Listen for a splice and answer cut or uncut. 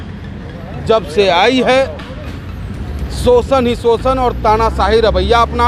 uncut